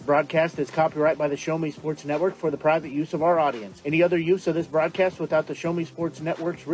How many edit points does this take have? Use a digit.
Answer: 0